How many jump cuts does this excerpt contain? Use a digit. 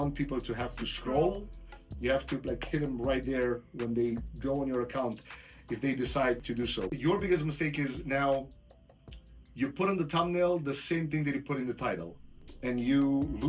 1